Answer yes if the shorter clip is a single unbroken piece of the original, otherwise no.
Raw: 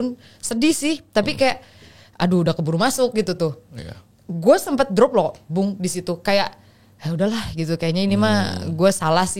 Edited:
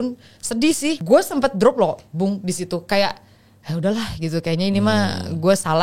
no